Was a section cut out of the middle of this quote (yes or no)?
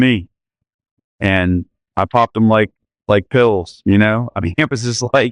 no